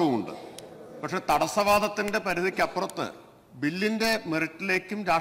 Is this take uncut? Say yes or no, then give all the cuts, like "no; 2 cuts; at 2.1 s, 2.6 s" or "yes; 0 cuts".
yes; 0 cuts